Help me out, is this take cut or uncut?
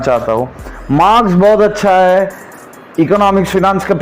uncut